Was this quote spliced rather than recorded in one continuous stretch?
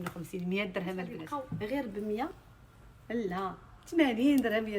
yes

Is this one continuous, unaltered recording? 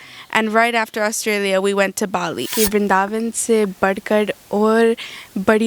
no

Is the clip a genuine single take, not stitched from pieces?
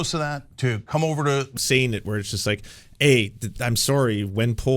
no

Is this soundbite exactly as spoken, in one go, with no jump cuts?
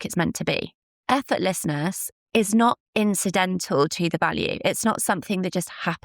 no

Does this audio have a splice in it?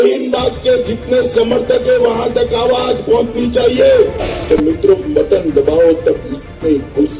no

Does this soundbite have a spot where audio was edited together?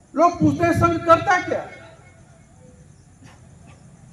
no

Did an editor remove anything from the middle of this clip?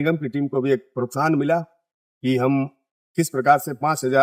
no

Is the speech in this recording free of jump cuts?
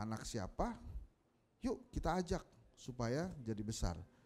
yes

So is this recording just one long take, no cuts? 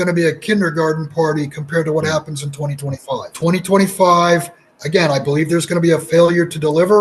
no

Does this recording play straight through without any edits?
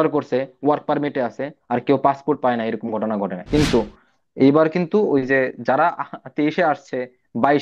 no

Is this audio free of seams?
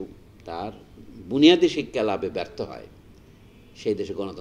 yes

